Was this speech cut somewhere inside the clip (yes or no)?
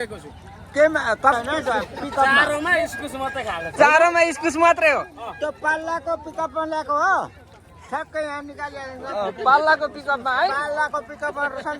yes